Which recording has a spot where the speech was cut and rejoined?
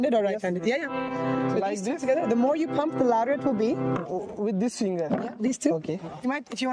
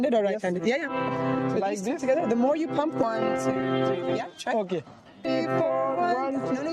second; 2 cuts; at 3.0 s, 5.3 s

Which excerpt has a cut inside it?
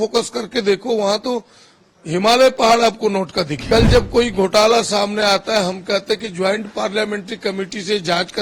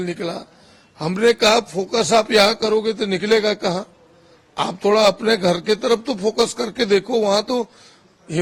first; 1 cut; at 3.6 s

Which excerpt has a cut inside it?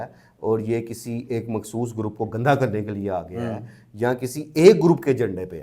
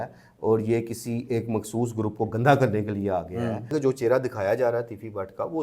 second; 1 cut; at 3.7 s

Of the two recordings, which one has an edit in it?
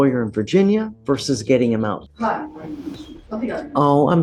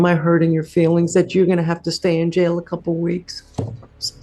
first; 3 cuts; at 0.9 s, 2.1 s, 3.1 s

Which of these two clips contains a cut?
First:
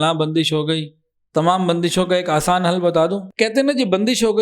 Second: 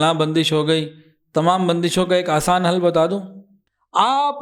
first; 1 cut; at 3.3 s

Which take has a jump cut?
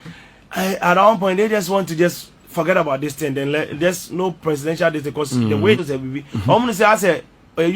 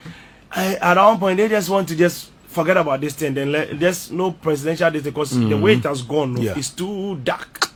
first; 1 cut; at 5.8 s

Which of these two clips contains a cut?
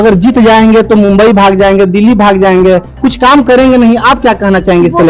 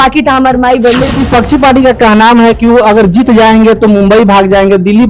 second; 1 cut; at 1.1 s

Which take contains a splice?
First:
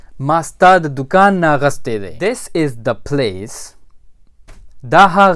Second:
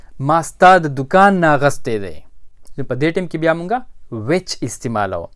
first; 1 cut; at 2.1 s

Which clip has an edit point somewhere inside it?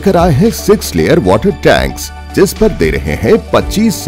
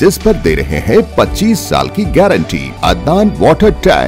second; 1 cut; at 2.7 s

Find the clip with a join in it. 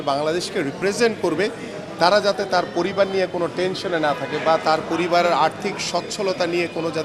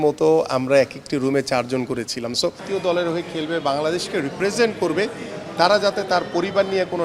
second; 1 cut; at 2.6 s

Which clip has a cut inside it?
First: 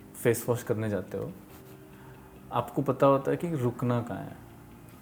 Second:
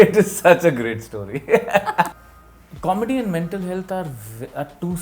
second; 1 cut; at 2.1 s

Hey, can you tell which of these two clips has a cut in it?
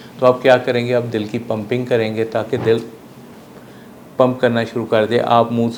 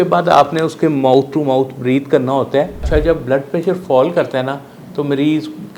second; 1 cut; at 2.9 s

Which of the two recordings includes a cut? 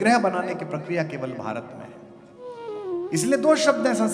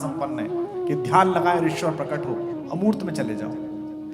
first; 1 cut; at 2.6 s

